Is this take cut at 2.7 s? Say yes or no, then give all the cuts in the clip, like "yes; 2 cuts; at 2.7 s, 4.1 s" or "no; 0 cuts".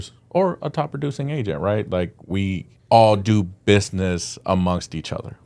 yes; 1 cut; at 2.7 s